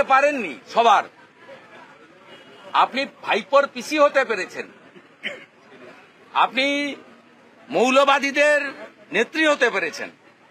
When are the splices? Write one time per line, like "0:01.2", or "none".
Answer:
none